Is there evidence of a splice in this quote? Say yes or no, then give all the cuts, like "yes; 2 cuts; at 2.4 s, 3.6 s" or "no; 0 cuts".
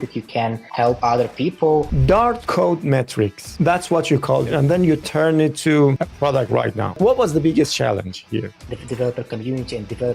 yes; 4 cuts; at 1.9 s, 4.5 s, 6.3 s, 8.5 s